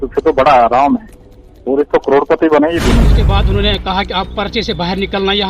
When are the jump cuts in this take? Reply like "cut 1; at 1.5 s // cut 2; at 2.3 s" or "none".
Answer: cut 1; at 3.2 s